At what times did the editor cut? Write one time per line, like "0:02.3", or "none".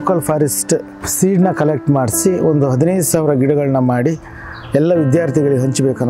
0:01.0